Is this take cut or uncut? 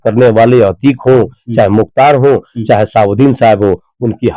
uncut